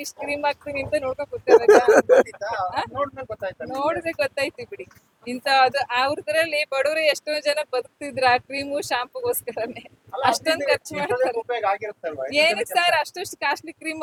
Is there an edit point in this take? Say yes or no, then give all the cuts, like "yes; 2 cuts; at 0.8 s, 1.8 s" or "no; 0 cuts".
no; 0 cuts